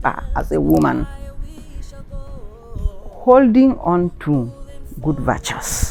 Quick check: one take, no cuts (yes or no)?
yes